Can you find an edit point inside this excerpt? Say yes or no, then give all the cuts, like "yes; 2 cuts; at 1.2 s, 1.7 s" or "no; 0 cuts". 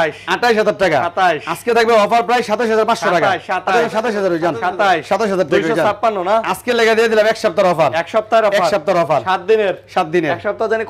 no; 0 cuts